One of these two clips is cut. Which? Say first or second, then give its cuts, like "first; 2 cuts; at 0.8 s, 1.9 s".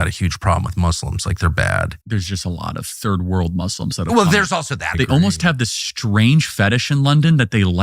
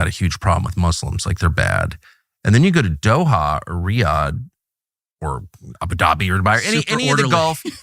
first; 2 cuts; at 2.0 s, 4.9 s